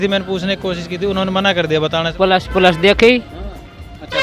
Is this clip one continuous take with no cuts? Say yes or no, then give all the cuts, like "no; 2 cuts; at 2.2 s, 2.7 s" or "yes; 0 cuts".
no; 1 cut; at 2.1 s